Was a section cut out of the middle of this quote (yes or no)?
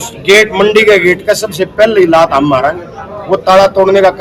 no